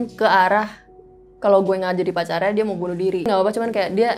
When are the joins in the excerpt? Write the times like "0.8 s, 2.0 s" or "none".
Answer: 3.3 s